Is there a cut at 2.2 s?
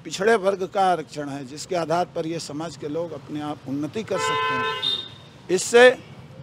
no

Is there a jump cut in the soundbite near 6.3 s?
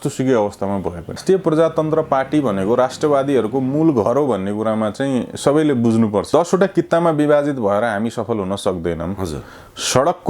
yes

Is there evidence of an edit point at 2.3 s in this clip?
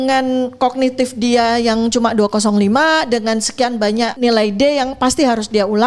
no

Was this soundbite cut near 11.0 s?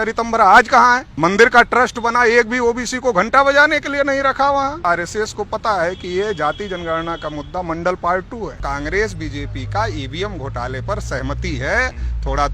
no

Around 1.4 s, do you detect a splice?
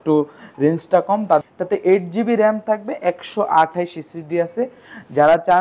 yes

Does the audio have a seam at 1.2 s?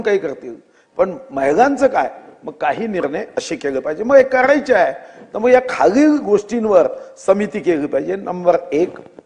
no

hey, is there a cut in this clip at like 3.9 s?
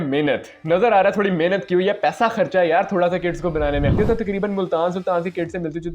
yes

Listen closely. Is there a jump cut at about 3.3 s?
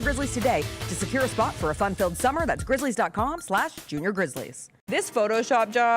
no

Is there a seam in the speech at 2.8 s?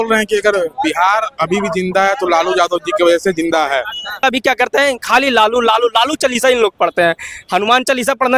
no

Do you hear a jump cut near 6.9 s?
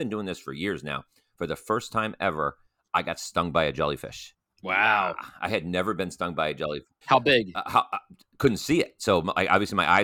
yes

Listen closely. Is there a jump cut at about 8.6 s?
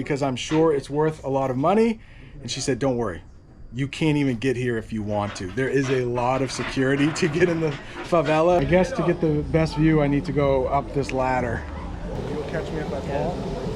yes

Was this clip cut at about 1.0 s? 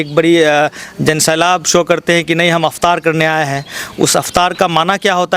no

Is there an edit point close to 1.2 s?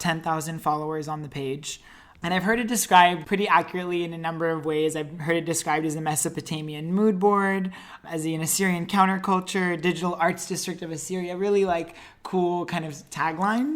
no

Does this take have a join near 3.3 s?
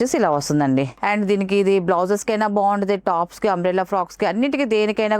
no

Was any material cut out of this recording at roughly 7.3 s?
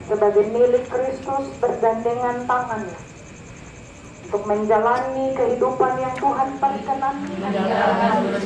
yes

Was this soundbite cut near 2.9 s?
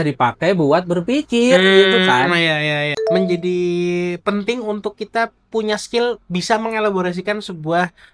yes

